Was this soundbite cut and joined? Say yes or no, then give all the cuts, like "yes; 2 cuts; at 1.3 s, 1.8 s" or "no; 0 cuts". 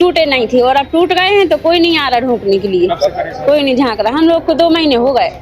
no; 0 cuts